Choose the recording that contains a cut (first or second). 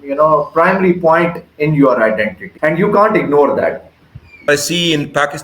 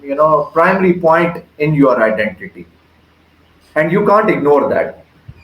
first